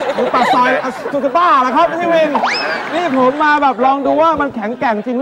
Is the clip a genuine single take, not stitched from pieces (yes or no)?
yes